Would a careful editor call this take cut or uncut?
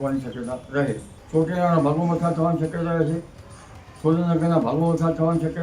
cut